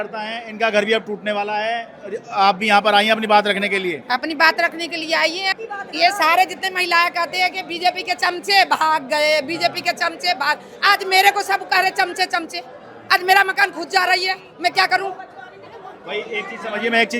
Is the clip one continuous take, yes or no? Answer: yes